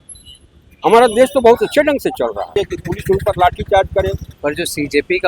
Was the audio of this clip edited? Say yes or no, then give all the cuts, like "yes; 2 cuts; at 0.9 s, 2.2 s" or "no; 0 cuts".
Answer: yes; 2 cuts; at 2.5 s, 4.3 s